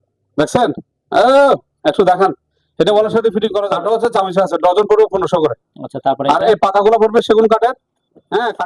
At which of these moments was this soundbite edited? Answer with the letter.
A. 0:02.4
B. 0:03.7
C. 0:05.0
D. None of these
B